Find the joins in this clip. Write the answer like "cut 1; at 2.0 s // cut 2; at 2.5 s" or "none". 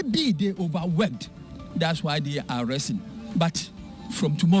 cut 1; at 3.2 s